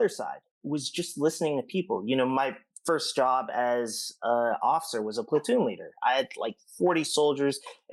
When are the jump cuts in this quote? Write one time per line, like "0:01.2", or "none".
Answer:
none